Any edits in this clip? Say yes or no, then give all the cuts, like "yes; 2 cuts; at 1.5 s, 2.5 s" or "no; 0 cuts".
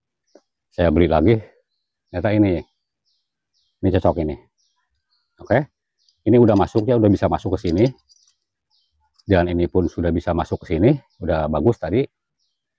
no; 0 cuts